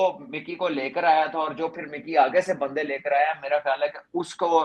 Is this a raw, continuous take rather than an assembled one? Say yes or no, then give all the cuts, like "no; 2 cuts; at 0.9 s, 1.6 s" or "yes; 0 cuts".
yes; 0 cuts